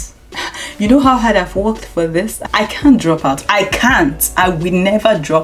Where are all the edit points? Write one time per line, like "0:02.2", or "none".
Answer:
0:02.4